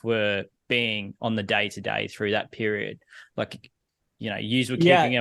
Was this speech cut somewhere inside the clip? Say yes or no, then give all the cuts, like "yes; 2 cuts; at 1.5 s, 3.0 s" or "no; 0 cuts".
no; 0 cuts